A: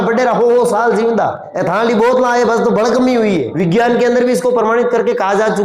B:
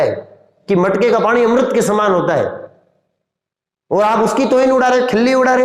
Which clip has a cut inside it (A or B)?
A